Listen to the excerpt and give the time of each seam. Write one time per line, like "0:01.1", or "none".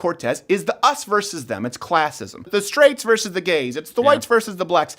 0:02.5